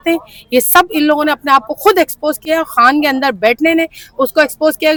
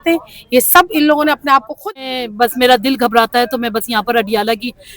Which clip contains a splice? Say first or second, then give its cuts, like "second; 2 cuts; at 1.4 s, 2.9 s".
second; 1 cut; at 1.8 s